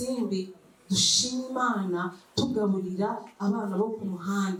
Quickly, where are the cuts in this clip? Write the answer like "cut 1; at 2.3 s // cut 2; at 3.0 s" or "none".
none

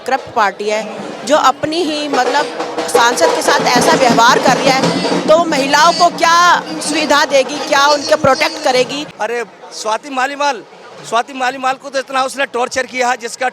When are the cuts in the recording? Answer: cut 1; at 9.0 s

